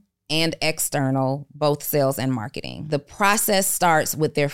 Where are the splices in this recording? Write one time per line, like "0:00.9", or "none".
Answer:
0:02.8